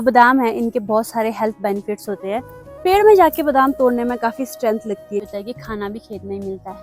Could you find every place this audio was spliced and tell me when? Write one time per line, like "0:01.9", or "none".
0:02.5
0:05.3